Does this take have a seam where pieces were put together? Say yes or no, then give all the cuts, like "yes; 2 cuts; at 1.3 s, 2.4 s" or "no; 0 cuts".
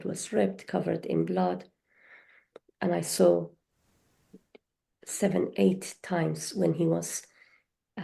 no; 0 cuts